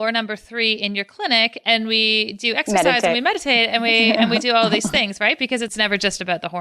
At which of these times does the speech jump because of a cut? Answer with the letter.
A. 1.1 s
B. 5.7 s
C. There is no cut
B